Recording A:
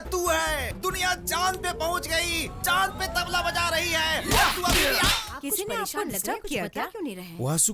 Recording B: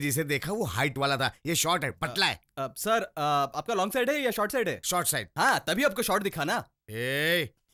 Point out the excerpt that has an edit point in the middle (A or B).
A